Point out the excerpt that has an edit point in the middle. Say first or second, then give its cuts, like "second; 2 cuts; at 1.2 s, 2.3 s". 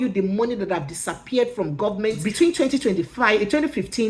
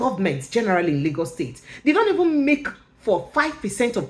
first; 1 cut; at 2.2 s